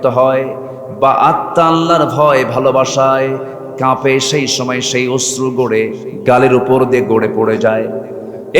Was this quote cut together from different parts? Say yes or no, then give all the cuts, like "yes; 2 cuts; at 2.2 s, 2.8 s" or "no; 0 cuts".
yes; 1 cut; at 6.1 s